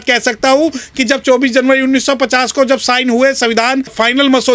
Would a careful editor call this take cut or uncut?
uncut